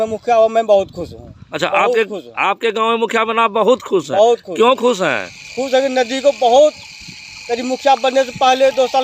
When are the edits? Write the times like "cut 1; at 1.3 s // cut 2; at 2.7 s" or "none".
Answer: none

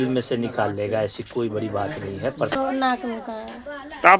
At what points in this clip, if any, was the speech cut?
cut 1; at 2.5 s

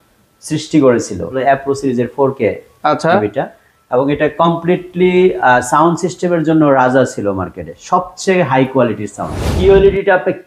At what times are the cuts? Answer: cut 1; at 1.3 s // cut 2; at 9.5 s

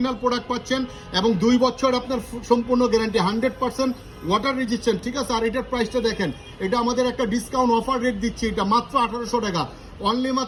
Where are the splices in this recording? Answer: none

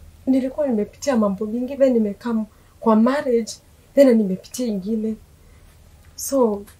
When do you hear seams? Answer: none

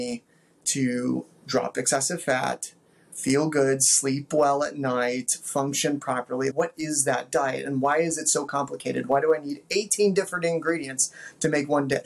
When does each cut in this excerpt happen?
none

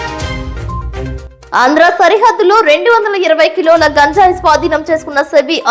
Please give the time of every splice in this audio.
cut 1; at 1.3 s

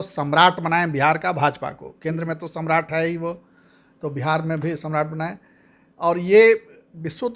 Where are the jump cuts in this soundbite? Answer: none

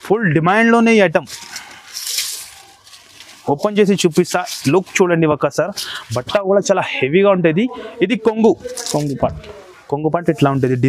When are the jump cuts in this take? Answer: none

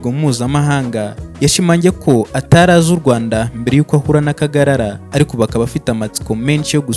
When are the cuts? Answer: cut 1; at 1.2 s // cut 2; at 5.0 s

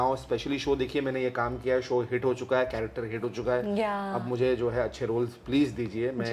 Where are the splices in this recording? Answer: none

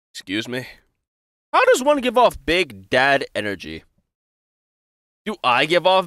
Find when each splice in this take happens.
none

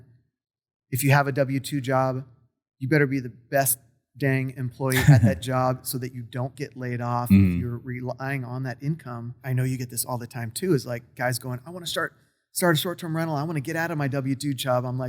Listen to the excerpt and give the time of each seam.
cut 1; at 9.4 s

